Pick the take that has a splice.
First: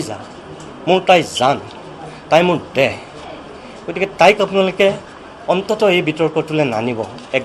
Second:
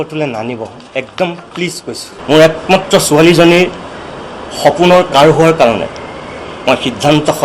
second; 1 cut; at 2.1 s

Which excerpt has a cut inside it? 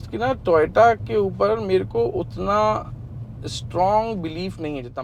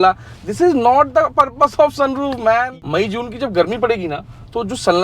second; 1 cut; at 2.7 s

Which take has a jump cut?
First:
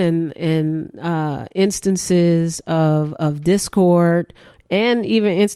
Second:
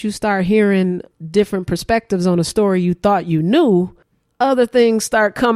second; 1 cut; at 1.1 s

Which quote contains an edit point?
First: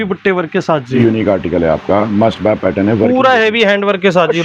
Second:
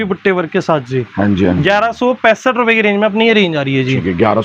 first; 1 cut; at 0.9 s

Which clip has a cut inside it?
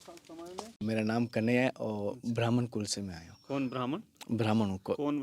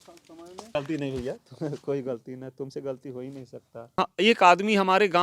second; 2 cuts; at 0.7 s, 3.9 s

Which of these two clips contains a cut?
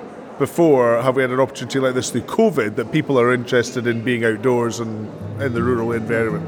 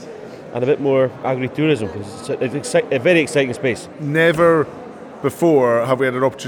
second; 2 cuts; at 1.2 s, 3.9 s

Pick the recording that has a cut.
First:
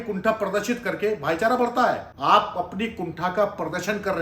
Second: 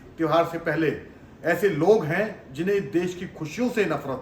first; 1 cut; at 2.1 s

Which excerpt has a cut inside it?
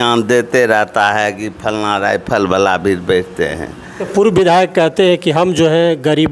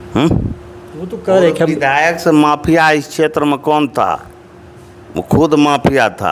first; 1 cut; at 4.0 s

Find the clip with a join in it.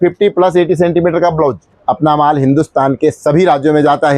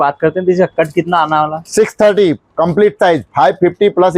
first; 1 cut; at 1.7 s

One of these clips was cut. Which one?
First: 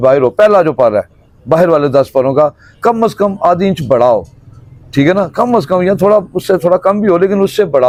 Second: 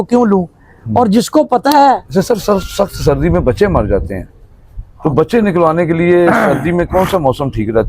second; 1 cut; at 2.0 s

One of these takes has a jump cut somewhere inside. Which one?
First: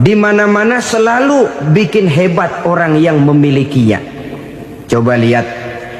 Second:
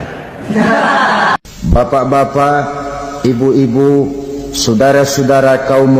second; 1 cut; at 1.4 s

